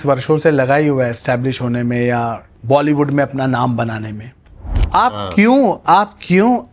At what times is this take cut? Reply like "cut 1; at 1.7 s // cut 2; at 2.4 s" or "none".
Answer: cut 1; at 2.5 s // cut 2; at 4.8 s